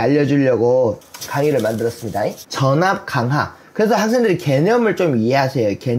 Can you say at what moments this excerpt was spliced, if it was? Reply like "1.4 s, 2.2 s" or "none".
1.0 s, 2.4 s